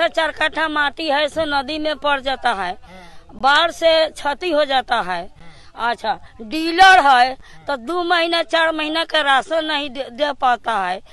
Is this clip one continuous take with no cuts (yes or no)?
yes